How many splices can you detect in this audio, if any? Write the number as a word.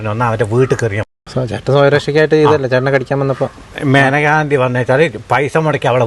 one